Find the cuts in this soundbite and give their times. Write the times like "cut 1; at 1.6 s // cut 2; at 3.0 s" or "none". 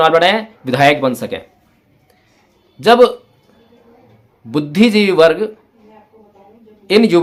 none

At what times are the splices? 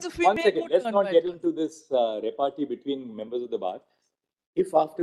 none

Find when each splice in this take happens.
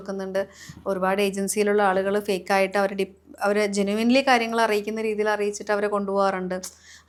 none

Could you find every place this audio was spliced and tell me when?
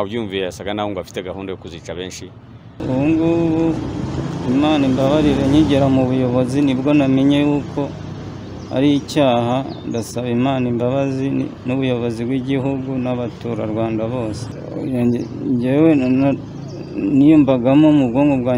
cut 1; at 2.8 s

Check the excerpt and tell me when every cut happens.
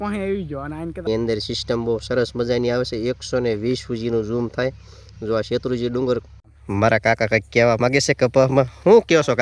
cut 1; at 1.1 s // cut 2; at 6.4 s

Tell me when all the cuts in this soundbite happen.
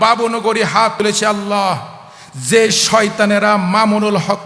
cut 1; at 0.9 s

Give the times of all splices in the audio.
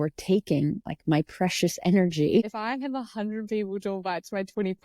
cut 1; at 2.5 s

